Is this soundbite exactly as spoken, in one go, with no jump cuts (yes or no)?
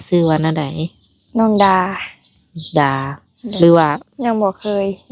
no